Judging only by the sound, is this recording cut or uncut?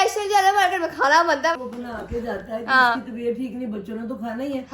cut